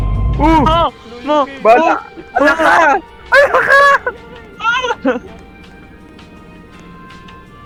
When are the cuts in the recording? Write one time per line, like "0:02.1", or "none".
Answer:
none